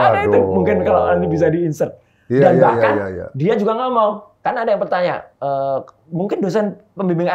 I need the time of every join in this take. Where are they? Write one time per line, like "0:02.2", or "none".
none